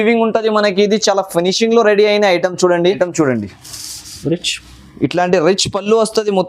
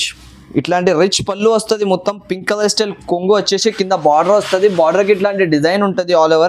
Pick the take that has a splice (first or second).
first